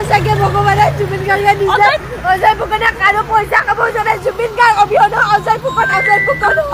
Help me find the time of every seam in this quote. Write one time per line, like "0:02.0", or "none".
0:02.0